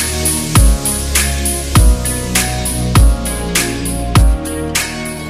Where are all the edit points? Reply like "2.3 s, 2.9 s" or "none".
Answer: none

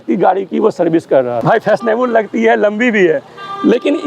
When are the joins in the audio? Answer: 1.3 s

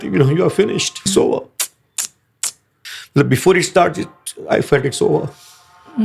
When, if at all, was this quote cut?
1.1 s, 2.7 s

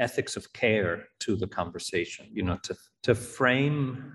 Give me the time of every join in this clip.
2.7 s

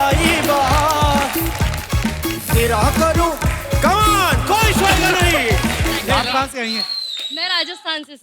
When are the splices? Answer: 6.0 s

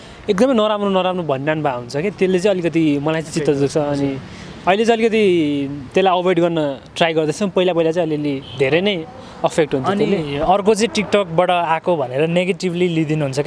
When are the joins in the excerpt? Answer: none

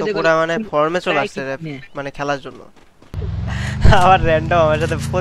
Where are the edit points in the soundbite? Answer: 3.2 s

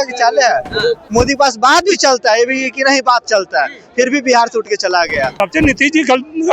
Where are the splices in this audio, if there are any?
1.0 s, 5.3 s

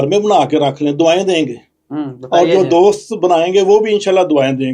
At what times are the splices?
none

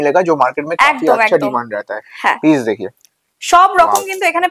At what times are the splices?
none

